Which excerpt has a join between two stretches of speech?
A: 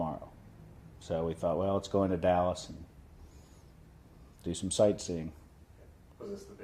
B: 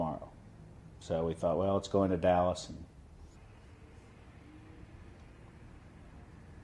A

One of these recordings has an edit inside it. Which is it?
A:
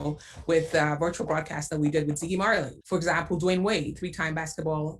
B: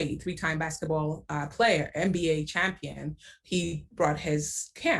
A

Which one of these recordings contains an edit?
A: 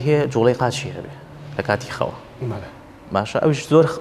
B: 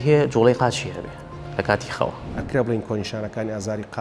B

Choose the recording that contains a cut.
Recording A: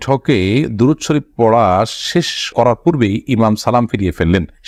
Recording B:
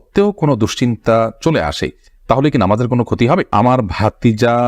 B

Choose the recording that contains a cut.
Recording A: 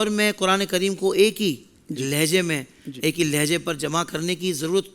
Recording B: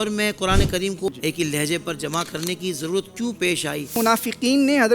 B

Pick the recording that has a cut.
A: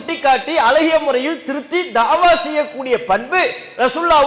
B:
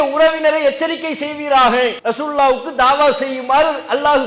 B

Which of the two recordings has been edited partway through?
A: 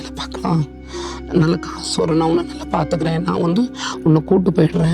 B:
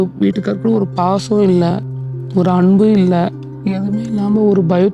B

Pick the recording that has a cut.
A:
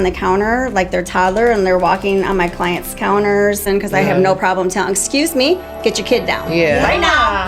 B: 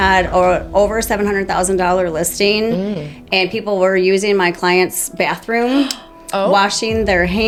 A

